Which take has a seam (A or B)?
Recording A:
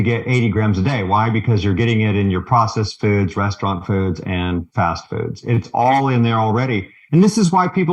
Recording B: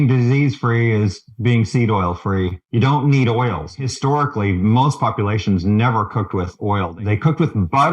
B